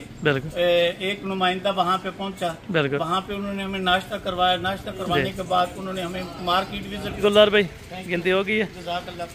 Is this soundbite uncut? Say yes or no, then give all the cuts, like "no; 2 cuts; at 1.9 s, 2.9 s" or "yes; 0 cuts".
no; 1 cut; at 7.2 s